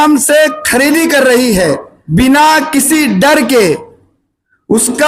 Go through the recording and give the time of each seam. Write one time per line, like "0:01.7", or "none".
0:01.9